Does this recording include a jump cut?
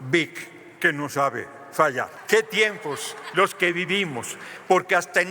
yes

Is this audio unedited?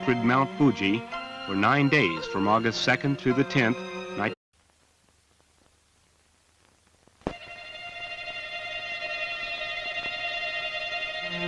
yes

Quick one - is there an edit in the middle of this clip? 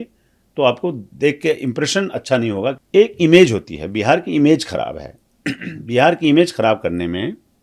yes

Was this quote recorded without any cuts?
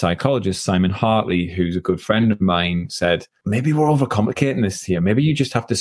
no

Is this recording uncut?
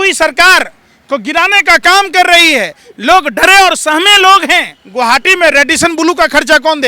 no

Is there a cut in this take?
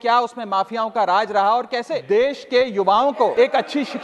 yes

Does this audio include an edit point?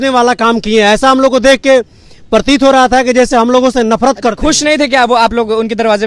no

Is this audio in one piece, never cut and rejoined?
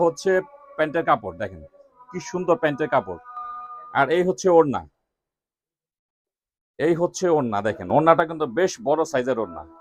yes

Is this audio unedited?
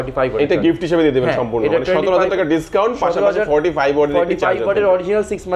yes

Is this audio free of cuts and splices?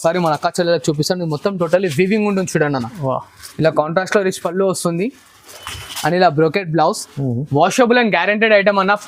yes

